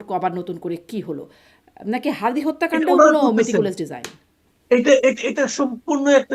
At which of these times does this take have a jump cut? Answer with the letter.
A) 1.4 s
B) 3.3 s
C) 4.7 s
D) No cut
D